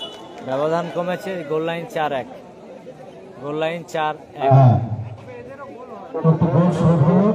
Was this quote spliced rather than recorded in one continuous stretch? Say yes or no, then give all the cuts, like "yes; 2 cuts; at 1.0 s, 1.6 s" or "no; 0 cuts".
no; 0 cuts